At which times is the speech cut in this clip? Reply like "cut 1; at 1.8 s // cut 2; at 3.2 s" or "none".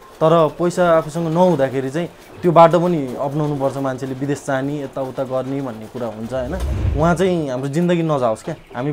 cut 1; at 6.8 s